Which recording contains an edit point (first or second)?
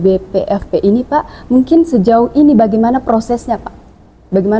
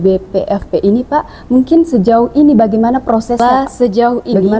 second